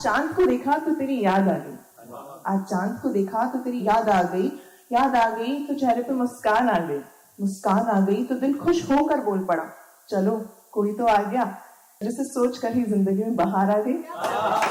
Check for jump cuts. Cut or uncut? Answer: uncut